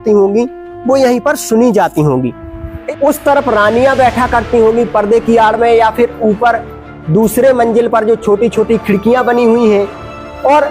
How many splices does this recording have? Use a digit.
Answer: 1